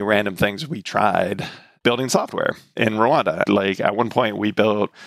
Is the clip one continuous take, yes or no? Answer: yes